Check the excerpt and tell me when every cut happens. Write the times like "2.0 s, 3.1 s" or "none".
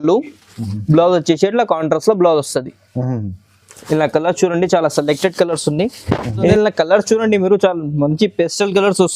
6.5 s